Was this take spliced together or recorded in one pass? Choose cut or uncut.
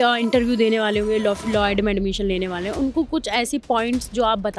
uncut